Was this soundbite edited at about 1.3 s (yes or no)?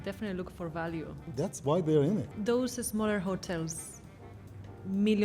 yes